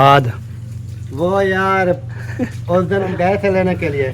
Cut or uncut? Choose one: cut